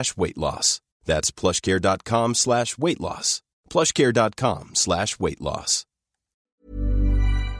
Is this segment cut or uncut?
cut